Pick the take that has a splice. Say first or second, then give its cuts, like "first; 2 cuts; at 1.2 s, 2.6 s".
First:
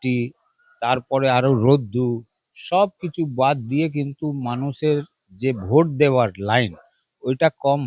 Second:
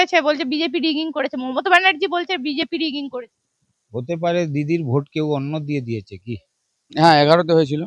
second; 1 cut; at 6.9 s